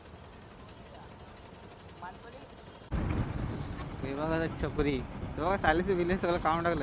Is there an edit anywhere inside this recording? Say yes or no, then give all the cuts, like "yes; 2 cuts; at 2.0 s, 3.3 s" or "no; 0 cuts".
yes; 1 cut; at 2.9 s